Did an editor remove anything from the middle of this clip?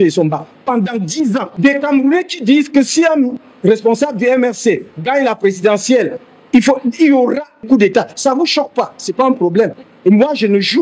yes; 3 cuts; at 1.5 s, 7.7 s, 9.9 s

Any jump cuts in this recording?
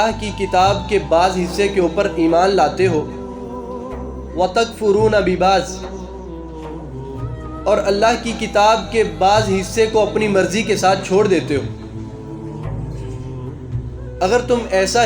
yes; 2 cuts; at 5.7 s, 7.2 s

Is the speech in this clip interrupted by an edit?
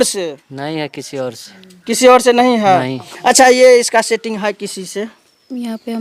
no; 0 cuts

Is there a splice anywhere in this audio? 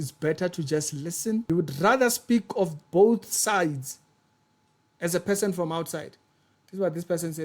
yes; 1 cut; at 1.4 s

